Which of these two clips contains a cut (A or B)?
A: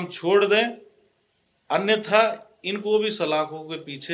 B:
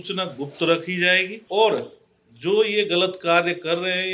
B